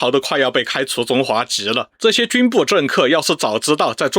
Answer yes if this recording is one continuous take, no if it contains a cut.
no